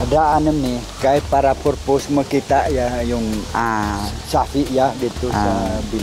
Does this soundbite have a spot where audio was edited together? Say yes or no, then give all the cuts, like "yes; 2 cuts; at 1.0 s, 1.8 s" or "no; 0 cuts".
no; 0 cuts